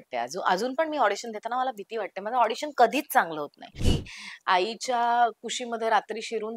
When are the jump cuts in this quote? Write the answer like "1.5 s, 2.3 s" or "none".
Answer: 3.9 s